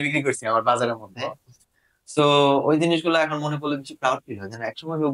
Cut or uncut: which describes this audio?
uncut